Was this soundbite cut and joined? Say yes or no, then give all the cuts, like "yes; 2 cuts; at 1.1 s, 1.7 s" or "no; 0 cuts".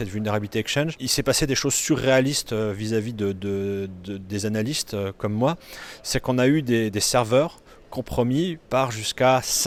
no; 0 cuts